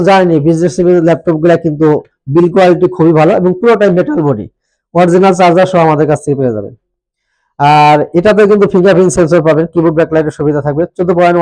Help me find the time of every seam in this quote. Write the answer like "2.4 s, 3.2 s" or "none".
none